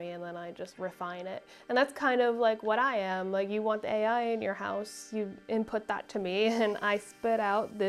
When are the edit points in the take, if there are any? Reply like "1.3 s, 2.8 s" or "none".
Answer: none